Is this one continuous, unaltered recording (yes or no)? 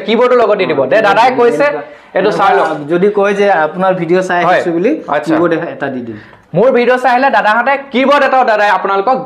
yes